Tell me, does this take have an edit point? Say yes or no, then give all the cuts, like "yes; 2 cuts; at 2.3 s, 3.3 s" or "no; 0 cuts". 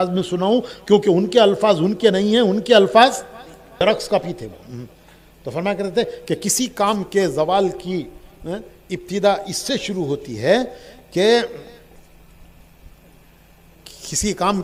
no; 0 cuts